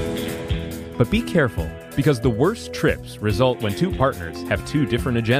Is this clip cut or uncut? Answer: cut